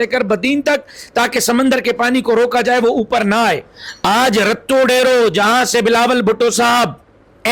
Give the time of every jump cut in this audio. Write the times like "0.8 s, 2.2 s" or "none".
3.6 s